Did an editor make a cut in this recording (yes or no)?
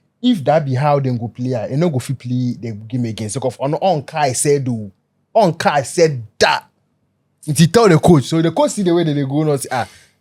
no